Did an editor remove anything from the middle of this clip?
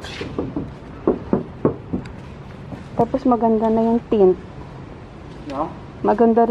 yes; 1 cut; at 2.8 s

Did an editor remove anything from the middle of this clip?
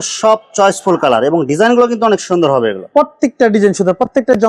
no; 0 cuts

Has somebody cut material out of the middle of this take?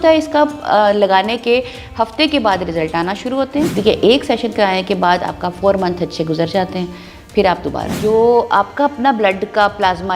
yes; 2 cuts; at 3.7 s, 7.9 s

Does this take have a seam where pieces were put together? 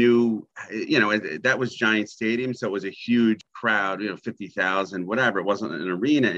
yes; 1 cut; at 3.4 s

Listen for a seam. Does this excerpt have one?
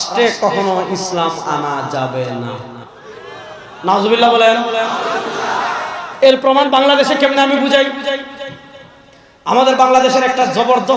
no; 0 cuts

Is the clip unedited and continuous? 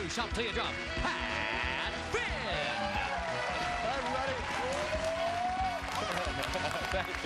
yes; 0 cuts

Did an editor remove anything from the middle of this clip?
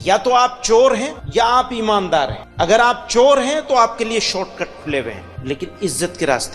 yes; 3 cuts; at 1.1 s, 2.4 s, 5.3 s

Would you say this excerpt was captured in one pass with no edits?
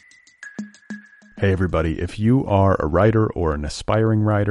no; 1 cut; at 0.9 s

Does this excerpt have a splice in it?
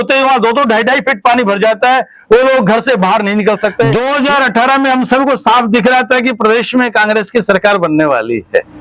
yes; 1 cut; at 3.9 s

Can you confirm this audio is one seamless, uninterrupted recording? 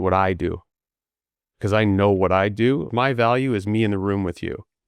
no; 1 cut; at 2.9 s

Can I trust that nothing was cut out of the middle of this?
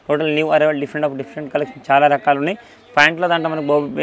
yes; 0 cuts

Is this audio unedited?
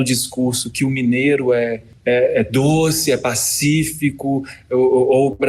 yes; 0 cuts

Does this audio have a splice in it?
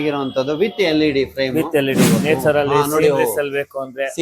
yes; 1 cut; at 2.2 s

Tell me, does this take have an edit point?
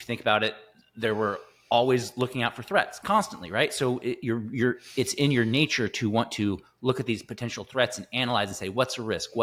no; 0 cuts

